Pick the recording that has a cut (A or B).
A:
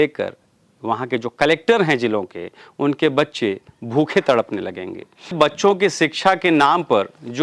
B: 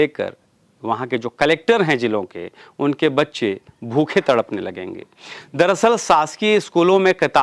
A